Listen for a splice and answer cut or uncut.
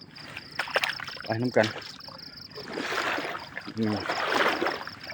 uncut